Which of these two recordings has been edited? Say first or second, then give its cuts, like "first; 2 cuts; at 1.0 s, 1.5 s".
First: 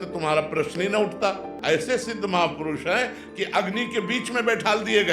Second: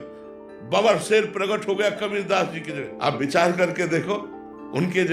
first; 1 cut; at 1.5 s